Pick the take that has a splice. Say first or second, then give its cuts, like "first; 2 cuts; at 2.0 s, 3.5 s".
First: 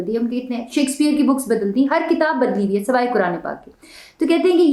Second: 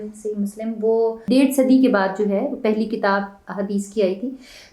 second; 1 cut; at 1.2 s